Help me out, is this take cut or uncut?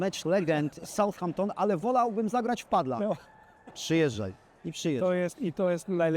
uncut